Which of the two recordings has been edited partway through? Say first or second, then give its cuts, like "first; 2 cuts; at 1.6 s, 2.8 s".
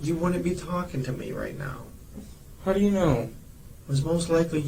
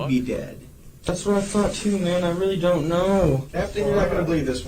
second; 1 cut; at 3.5 s